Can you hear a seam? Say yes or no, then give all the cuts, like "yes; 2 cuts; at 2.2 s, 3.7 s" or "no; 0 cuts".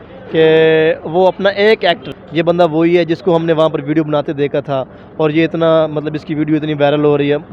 yes; 1 cut; at 2.1 s